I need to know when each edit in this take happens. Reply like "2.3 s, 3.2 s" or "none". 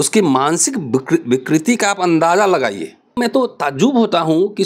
3.1 s